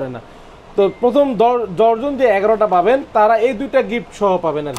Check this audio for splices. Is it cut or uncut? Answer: uncut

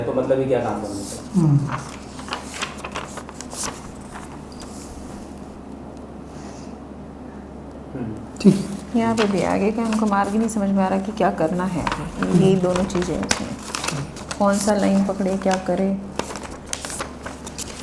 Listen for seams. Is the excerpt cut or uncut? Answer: uncut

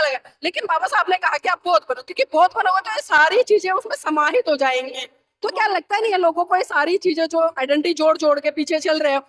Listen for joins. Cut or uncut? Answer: uncut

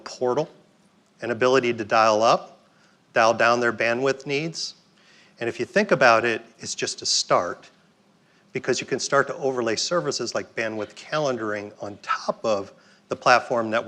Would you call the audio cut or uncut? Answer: cut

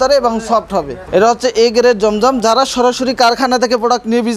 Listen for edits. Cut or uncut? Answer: cut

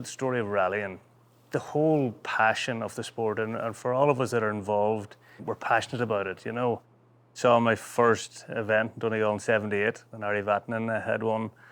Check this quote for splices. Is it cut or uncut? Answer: cut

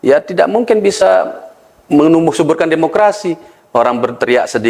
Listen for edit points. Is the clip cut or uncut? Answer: uncut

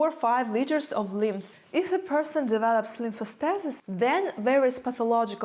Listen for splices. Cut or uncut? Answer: cut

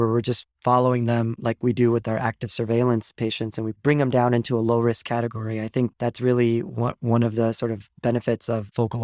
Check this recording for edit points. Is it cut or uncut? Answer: cut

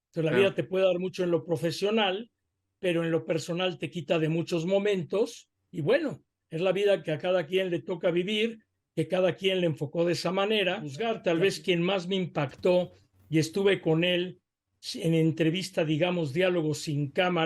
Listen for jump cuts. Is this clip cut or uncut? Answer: cut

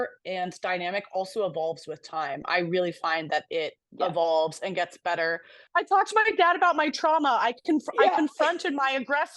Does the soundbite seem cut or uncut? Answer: cut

